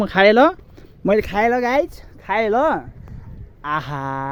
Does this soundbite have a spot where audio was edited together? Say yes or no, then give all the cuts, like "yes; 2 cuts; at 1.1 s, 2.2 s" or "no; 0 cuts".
no; 0 cuts